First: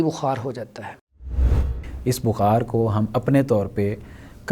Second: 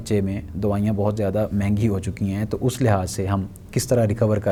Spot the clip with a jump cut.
first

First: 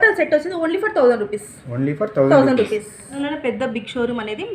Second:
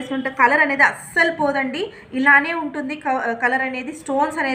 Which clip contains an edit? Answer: first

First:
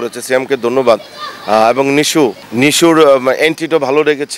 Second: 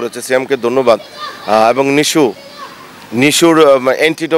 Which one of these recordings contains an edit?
first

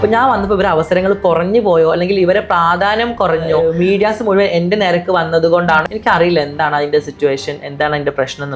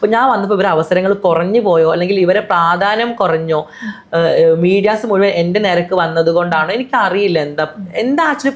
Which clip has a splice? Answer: first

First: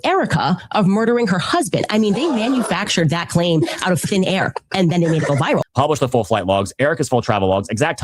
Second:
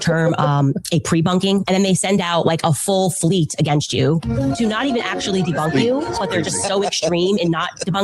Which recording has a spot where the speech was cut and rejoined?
first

